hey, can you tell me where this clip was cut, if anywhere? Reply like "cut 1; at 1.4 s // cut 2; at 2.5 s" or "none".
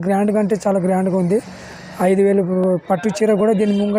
none